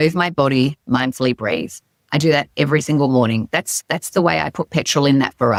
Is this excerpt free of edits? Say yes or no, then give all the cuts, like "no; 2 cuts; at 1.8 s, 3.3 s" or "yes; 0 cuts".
yes; 0 cuts